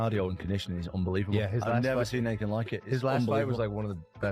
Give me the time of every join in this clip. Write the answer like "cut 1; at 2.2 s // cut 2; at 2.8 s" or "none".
none